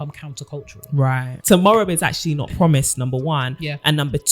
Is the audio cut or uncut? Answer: cut